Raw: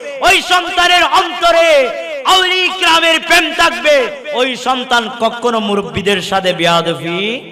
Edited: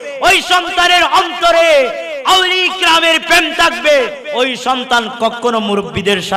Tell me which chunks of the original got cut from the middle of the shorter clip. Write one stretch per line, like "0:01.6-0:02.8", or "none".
none

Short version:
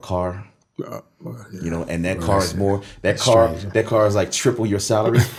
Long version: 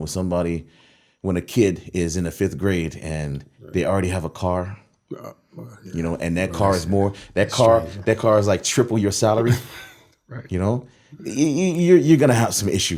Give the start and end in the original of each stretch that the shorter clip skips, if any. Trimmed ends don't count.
none

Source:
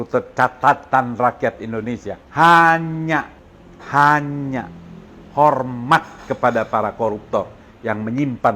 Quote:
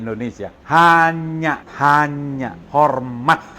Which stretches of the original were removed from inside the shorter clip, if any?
0:03.3-0:03.8
0:04.7-0:05.2

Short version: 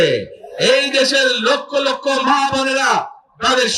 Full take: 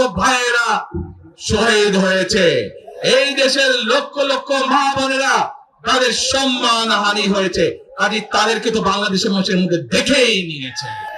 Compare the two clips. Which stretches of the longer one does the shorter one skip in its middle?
none

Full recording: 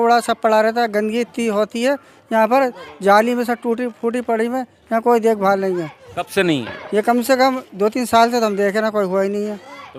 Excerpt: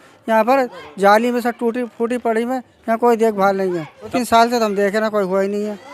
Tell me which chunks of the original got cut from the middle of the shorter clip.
0:06.2-0:08.0

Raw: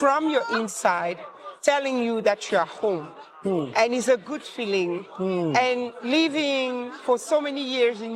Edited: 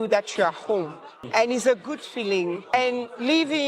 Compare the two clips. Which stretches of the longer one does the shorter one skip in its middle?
0:03.4-0:03.7
0:05.1-0:05.6

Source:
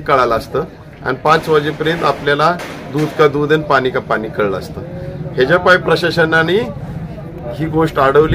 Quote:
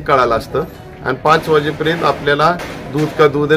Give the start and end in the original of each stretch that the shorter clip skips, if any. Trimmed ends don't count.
none

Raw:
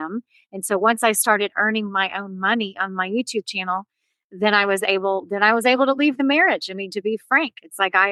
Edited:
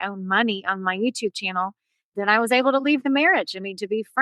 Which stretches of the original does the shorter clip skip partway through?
0:04.2-0:05.3

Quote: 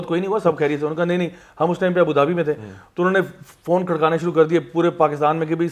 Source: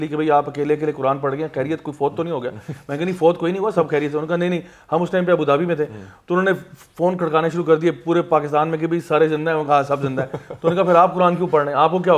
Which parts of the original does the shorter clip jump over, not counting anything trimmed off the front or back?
none

